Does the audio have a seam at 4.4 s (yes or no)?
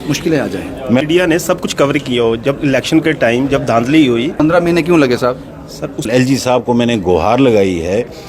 yes